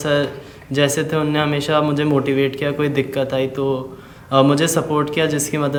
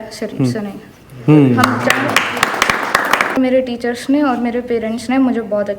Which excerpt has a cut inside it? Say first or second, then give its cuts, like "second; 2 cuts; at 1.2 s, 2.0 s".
second; 1 cut; at 3.4 s